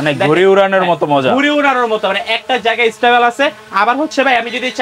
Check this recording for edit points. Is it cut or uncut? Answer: uncut